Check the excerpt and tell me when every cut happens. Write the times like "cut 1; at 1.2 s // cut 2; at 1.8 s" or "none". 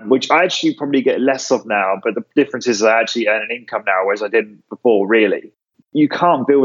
cut 1; at 5.7 s